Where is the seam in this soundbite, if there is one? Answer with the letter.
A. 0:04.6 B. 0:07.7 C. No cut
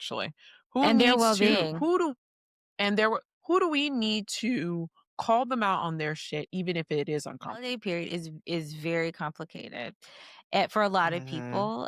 B